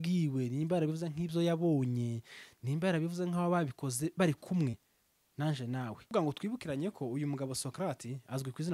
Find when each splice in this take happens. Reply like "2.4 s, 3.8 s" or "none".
6.1 s